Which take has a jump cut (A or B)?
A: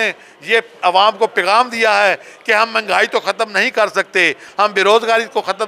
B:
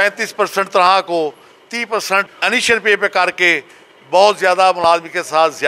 B